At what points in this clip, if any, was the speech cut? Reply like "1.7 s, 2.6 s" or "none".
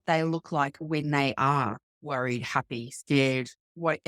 none